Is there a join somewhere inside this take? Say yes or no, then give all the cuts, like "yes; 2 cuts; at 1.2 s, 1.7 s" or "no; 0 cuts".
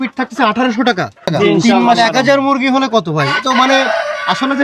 yes; 1 cut; at 1.9 s